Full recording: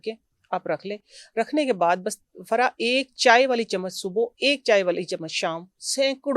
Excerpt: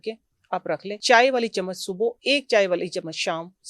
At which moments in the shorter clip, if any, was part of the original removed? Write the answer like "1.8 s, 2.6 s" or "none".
1.0 s